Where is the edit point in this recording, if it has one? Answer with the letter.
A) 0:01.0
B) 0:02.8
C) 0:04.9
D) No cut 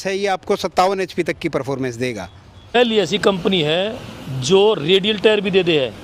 B